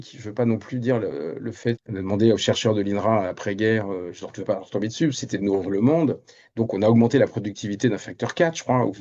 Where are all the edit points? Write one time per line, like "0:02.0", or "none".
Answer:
0:01.8